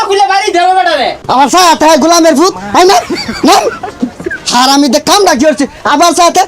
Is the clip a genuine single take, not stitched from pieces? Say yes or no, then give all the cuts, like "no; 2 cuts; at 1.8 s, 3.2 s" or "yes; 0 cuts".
no; 1 cut; at 1.2 s